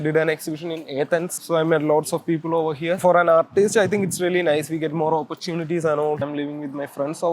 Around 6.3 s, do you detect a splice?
yes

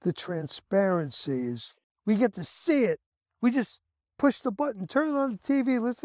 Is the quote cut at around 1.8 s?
yes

